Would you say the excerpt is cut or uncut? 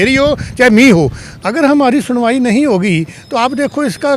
cut